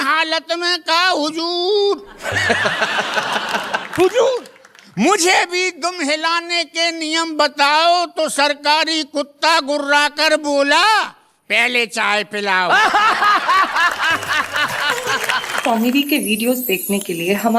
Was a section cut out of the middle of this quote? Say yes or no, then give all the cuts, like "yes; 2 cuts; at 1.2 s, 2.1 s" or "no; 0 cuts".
yes; 1 cut; at 15.5 s